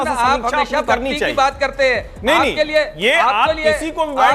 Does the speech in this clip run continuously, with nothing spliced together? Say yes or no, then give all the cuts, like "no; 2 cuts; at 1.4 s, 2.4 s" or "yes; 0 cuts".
yes; 0 cuts